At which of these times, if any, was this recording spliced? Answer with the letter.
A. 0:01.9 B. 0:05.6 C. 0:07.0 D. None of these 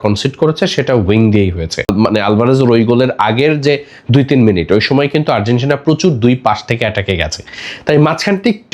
A